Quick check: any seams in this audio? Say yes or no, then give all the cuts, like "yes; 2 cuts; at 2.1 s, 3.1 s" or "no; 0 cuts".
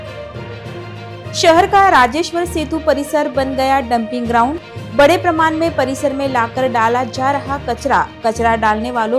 yes; 1 cut; at 1.2 s